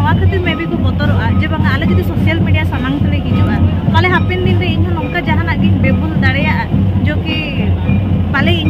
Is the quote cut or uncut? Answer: uncut